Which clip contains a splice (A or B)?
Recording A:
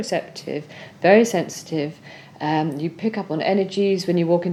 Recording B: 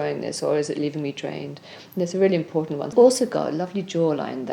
B